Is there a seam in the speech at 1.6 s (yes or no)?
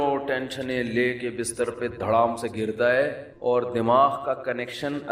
no